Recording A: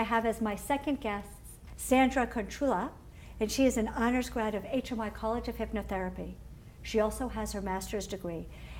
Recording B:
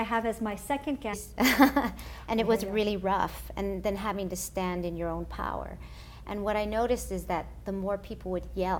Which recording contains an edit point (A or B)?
A